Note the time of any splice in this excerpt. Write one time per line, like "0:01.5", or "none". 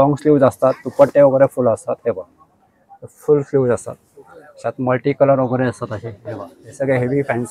none